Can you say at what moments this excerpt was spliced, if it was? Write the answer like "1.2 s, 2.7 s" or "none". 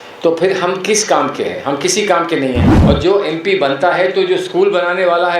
2.7 s